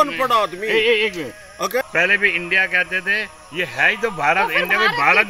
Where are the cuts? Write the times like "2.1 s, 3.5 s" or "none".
1.8 s